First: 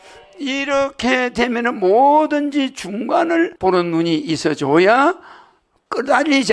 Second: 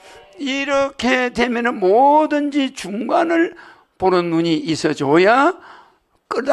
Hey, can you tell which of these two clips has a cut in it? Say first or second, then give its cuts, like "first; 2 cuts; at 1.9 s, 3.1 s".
first; 1 cut; at 3.5 s